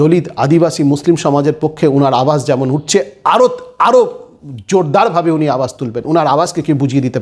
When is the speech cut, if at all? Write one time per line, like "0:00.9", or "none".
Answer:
none